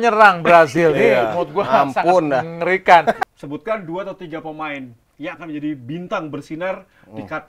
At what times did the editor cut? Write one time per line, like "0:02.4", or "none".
0:03.2